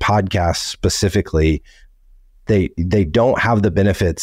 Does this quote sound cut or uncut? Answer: uncut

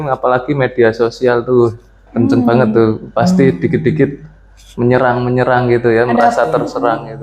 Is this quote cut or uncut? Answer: uncut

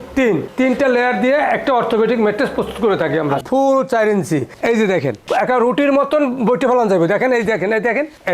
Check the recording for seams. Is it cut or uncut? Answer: cut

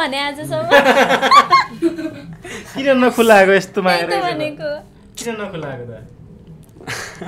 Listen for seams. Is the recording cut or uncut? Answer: uncut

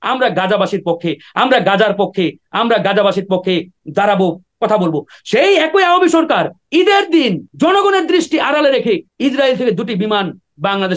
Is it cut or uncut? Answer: cut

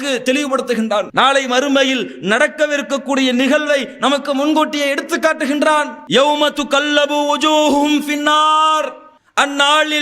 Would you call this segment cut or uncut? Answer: uncut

